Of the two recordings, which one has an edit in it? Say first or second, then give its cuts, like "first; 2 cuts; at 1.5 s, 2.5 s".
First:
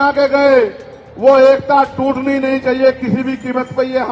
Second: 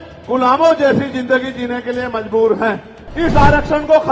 second; 1 cut; at 3.0 s